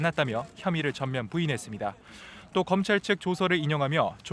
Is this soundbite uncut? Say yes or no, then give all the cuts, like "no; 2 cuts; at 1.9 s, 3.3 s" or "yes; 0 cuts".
yes; 0 cuts